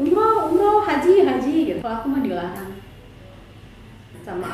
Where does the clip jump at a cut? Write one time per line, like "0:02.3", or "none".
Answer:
0:01.8